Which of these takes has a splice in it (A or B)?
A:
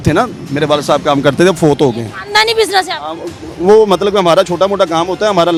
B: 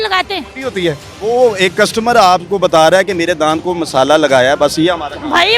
B